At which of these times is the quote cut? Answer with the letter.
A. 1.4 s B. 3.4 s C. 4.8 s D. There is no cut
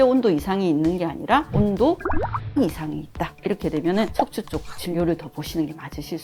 D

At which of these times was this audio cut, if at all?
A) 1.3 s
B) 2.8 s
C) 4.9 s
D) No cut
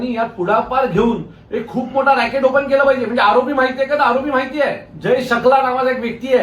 C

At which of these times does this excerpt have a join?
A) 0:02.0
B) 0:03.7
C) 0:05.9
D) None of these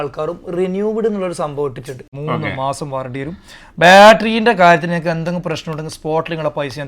A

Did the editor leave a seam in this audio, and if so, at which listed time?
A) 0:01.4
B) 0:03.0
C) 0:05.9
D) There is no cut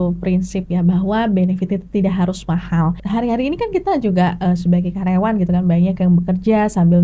B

